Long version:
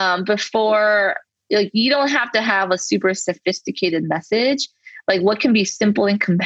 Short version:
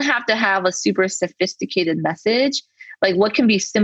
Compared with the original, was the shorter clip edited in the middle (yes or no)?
no